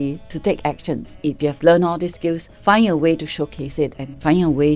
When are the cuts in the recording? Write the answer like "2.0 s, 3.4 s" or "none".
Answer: 1.2 s, 2.5 s